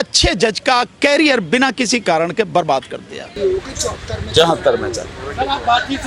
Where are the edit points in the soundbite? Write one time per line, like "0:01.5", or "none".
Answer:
0:03.4